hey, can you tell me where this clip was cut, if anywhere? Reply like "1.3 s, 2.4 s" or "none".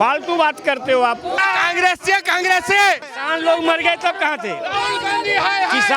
1.4 s, 3.1 s